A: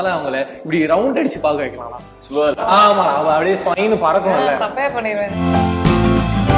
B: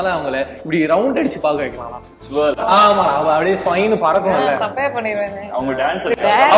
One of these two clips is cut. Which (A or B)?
A